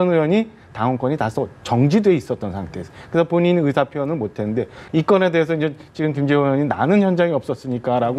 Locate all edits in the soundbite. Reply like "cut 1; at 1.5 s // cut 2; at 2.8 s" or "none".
cut 1; at 4.8 s

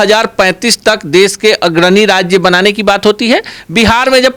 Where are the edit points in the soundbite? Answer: none

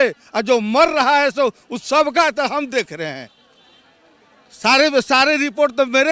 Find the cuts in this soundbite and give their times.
none

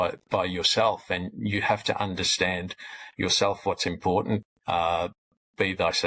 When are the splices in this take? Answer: cut 1; at 4.5 s

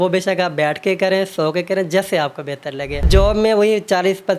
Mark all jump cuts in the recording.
cut 1; at 3.1 s

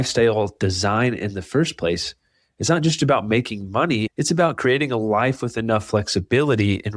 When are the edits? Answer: cut 1; at 4.1 s

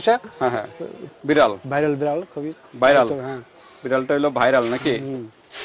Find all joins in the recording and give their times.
cut 1; at 1.0 s

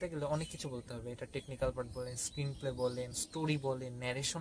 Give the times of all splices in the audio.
none

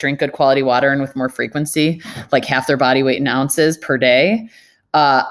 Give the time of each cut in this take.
none

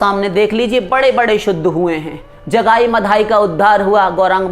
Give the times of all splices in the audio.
none

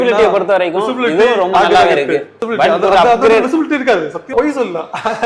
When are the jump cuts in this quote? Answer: cut 1; at 2.4 s // cut 2; at 4.3 s

